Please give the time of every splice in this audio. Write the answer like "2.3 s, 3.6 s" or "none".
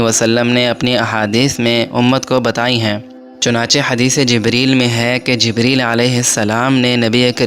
none